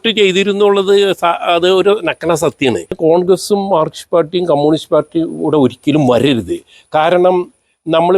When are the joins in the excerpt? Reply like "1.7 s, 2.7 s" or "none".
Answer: 3.0 s